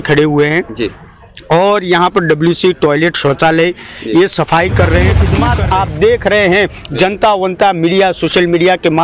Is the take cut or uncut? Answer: cut